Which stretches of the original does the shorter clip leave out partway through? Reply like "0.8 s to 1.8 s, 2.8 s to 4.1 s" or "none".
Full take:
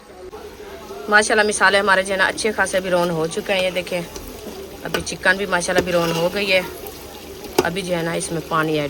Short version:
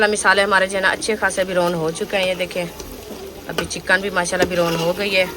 none